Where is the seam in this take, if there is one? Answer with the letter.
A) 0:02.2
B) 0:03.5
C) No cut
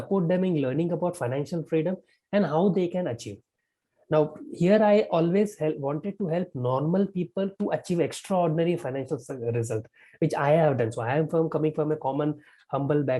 C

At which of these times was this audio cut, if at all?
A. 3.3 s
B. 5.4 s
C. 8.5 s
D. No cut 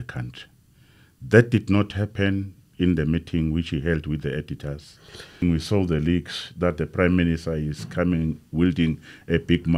B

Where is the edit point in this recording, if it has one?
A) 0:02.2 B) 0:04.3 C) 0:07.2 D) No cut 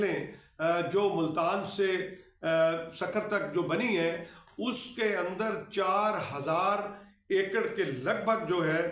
D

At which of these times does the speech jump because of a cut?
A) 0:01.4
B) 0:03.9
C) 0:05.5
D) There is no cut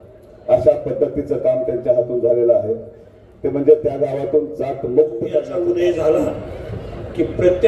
C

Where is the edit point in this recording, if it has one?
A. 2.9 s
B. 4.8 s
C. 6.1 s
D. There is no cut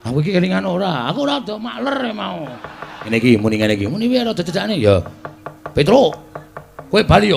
A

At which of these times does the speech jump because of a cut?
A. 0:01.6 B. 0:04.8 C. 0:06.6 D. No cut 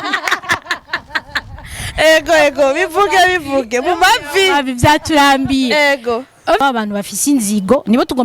C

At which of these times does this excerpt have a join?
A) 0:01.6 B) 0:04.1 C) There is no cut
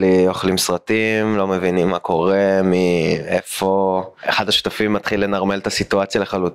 B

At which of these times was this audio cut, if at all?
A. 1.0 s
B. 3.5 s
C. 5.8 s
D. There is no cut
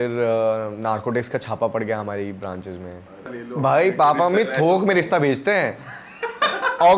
B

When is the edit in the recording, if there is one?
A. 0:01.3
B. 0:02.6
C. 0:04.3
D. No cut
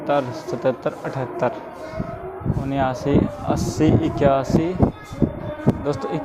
D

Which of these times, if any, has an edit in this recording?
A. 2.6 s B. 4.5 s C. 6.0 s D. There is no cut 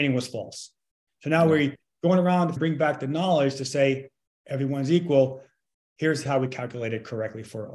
A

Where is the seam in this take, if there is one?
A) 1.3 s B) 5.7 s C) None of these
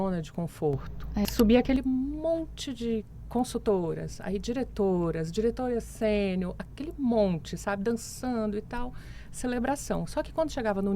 A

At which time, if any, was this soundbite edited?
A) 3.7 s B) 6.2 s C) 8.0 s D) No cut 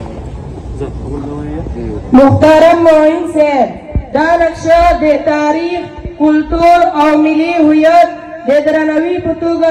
D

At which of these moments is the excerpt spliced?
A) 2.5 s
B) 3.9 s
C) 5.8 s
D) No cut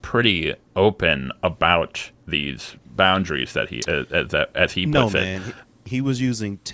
C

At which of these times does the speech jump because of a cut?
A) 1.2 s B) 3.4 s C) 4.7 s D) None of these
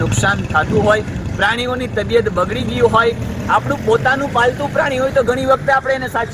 D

